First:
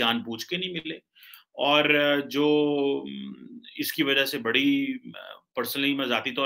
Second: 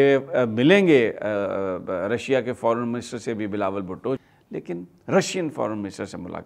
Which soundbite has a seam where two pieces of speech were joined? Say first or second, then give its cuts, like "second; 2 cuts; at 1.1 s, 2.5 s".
second; 1 cut; at 4.2 s